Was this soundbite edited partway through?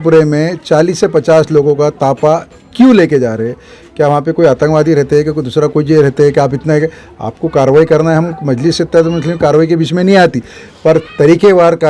no; 0 cuts

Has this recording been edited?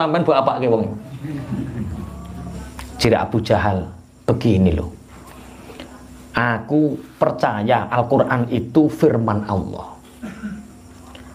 yes; 1 cut; at 2.6 s

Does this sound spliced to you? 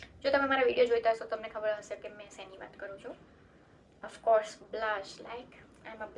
no; 0 cuts

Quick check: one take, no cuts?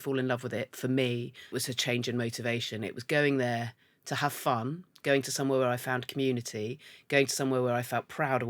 no; 1 cut; at 1.5 s

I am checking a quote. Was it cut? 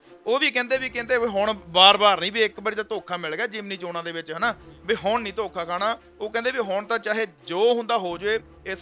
yes; 1 cut; at 6.1 s

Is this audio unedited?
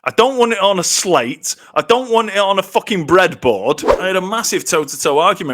no; 1 cut; at 3.9 s

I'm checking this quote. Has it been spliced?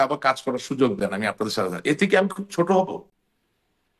no; 0 cuts

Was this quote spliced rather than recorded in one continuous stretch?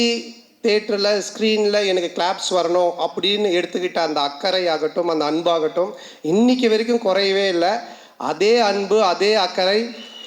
no; 0 cuts

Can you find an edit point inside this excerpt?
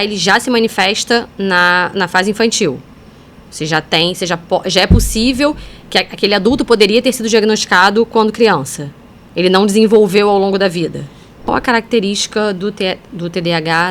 yes; 1 cut; at 11.5 s

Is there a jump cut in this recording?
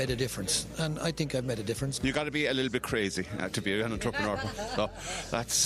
yes; 1 cut; at 1.9 s

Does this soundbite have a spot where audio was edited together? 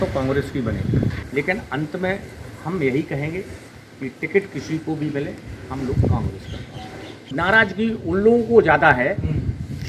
yes; 2 cuts; at 1.2 s, 7.3 s

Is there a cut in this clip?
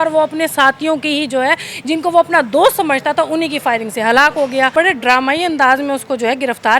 yes; 1 cut; at 4.7 s

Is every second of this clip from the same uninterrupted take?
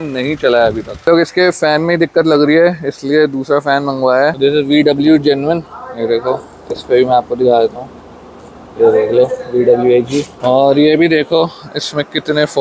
no; 3 cuts; at 1.1 s, 4.3 s, 10.3 s

